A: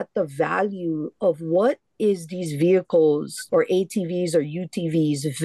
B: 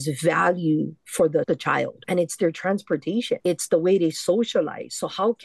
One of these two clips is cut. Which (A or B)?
B